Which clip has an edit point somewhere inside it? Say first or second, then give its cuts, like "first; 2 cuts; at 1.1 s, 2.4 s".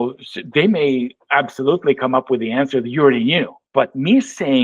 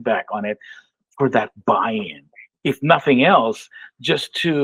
first; 1 cut; at 3.6 s